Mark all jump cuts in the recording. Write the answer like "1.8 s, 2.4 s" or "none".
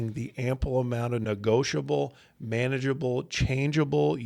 none